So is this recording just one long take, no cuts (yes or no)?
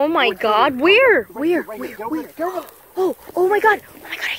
yes